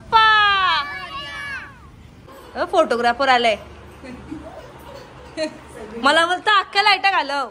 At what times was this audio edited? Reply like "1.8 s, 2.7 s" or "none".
2.2 s